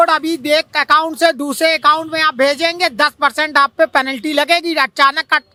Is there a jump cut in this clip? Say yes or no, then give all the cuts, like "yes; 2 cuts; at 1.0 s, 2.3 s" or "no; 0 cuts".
no; 0 cuts